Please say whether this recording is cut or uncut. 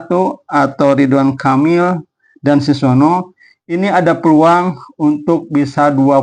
uncut